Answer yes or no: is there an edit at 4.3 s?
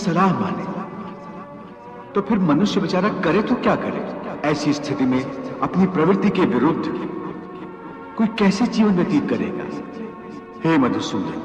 yes